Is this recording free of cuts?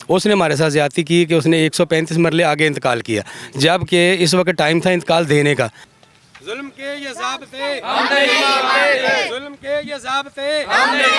no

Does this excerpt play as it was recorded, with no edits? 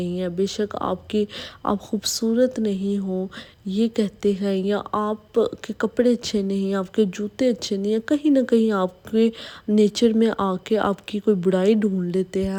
yes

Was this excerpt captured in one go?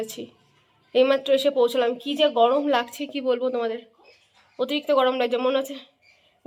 yes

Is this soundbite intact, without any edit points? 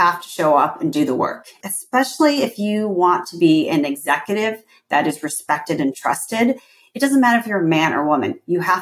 no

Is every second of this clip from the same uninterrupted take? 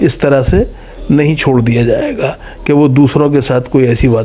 yes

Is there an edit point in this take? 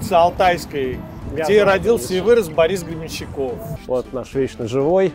yes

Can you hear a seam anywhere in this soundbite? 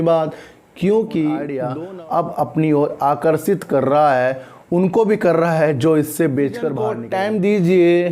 yes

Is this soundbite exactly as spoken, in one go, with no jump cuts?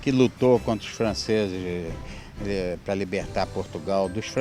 yes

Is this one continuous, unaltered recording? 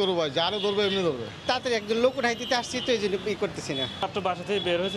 no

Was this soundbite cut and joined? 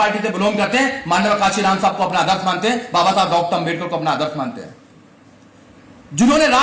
no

